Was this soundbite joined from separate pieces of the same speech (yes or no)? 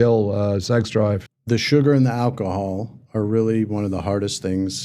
yes